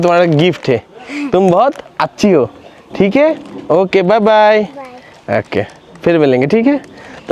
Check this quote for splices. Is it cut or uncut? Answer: uncut